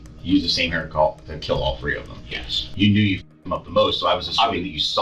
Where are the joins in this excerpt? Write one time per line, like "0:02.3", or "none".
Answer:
0:02.6